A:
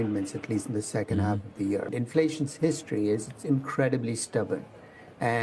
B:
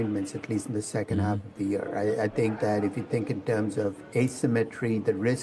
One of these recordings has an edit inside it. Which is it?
A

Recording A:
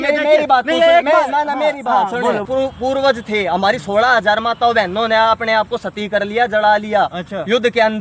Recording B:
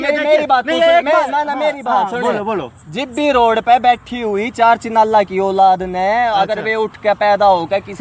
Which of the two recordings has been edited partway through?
A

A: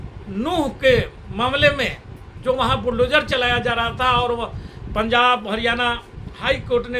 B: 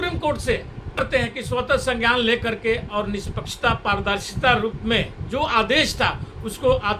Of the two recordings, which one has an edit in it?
B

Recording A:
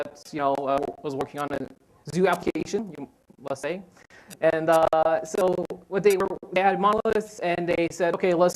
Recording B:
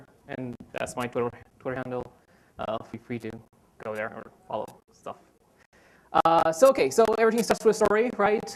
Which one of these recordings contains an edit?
A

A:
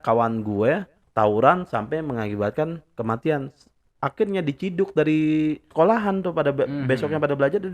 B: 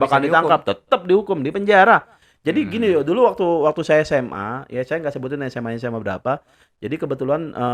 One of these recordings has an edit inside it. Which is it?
A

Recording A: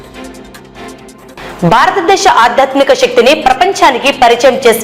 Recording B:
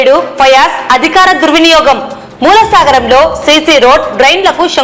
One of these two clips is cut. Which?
A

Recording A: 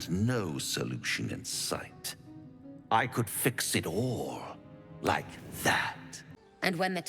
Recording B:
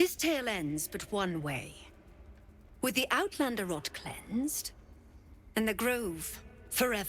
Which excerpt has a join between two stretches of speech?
A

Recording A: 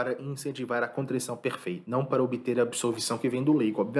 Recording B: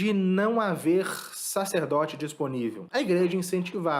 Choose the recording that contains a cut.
B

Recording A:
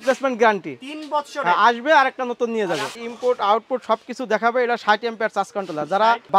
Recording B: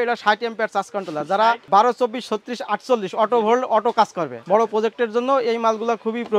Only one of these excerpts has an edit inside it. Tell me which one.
A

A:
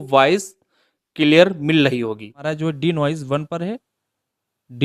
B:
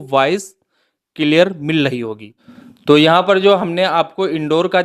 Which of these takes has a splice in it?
A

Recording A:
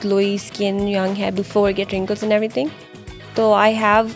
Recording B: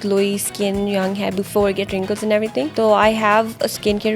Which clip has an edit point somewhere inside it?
B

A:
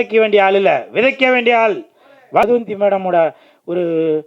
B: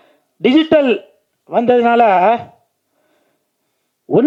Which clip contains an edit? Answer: A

